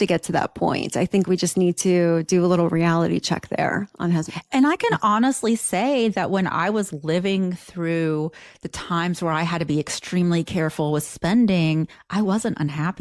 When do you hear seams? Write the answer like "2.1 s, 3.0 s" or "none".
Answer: none